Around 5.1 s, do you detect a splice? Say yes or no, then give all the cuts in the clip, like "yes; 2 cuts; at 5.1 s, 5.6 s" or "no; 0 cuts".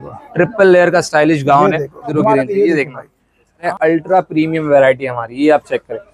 no; 2 cuts; at 2.1 s, 3.7 s